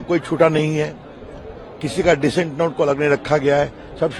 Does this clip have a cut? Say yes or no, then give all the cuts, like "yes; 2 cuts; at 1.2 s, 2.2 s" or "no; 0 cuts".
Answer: no; 0 cuts